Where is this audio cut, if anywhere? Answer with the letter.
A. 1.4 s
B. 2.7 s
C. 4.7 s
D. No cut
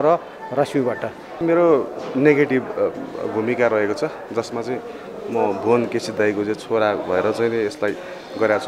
A